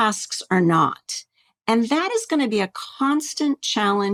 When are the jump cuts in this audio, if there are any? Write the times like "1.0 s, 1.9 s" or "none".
none